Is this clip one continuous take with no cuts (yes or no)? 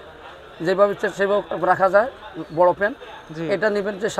yes